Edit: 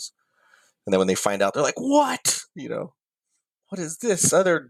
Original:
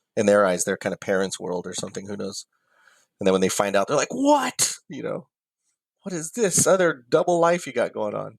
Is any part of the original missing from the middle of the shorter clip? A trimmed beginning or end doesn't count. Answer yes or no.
no